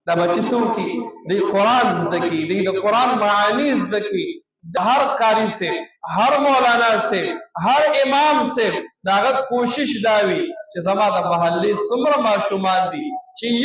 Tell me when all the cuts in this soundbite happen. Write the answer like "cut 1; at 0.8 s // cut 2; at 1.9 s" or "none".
cut 1; at 4.7 s